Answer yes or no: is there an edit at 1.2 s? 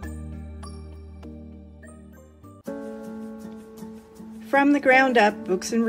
no